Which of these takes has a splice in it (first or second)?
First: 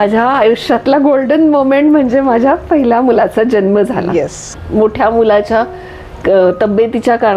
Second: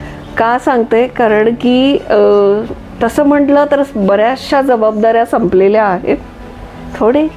first